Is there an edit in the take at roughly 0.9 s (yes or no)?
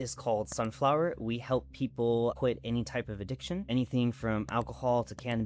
no